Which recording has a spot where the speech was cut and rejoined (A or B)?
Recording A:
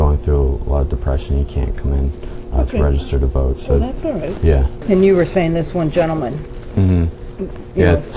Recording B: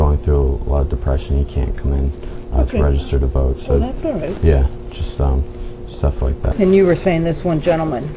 A